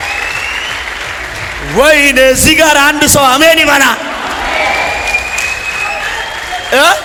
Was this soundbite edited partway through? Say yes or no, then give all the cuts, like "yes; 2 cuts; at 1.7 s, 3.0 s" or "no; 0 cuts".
no; 0 cuts